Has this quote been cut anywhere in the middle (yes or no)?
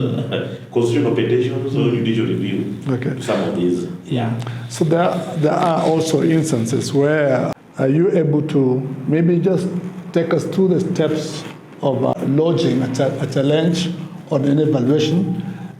yes